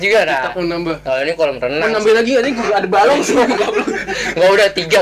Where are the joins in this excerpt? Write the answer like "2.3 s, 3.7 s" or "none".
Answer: none